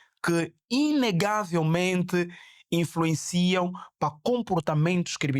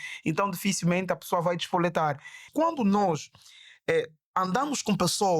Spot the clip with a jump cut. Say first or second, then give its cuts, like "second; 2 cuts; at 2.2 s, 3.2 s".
second; 1 cut; at 2.5 s